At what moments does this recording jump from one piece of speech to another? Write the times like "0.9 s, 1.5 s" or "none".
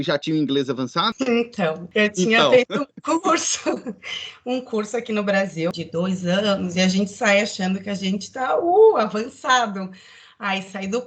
1.1 s, 1.8 s, 5.7 s

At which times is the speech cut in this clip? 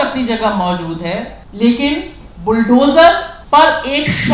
1.4 s, 3.3 s

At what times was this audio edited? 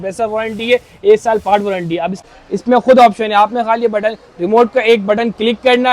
2.2 s

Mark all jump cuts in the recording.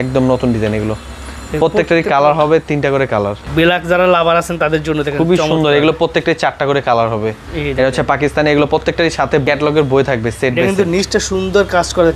3.4 s, 7.5 s, 9.5 s

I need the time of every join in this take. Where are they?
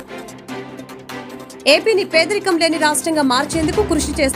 1.5 s

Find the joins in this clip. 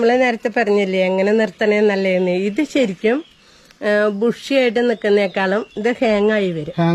none

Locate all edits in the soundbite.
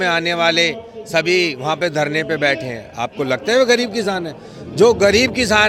none

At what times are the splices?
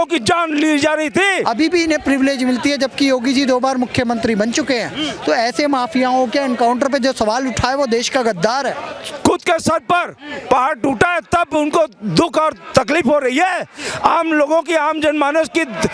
1.4 s, 8.7 s

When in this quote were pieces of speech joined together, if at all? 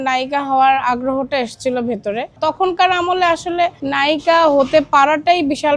2.4 s, 3.8 s

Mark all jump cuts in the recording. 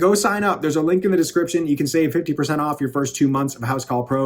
none

